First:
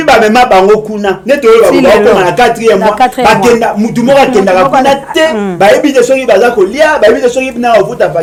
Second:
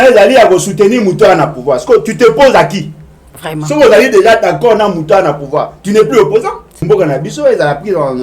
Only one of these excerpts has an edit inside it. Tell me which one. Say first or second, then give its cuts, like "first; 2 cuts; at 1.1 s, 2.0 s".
second; 1 cut; at 6.8 s